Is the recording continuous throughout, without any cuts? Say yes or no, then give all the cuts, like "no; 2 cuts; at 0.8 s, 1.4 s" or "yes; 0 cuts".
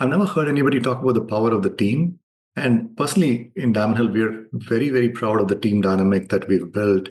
no; 1 cut; at 2.7 s